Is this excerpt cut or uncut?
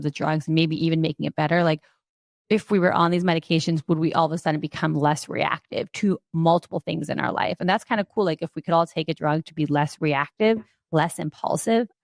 uncut